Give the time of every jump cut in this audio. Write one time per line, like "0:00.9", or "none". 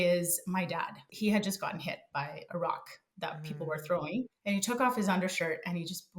0:01.0
0:04.4